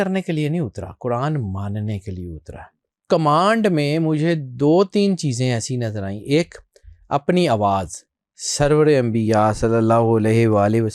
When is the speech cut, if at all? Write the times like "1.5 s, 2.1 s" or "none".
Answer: 2.9 s